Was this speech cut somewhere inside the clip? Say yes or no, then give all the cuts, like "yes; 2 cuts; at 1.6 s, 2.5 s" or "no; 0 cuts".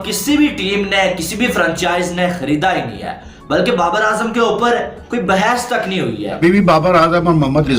yes; 1 cut; at 6.4 s